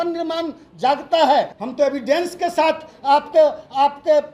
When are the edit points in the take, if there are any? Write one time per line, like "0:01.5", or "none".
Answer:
0:01.6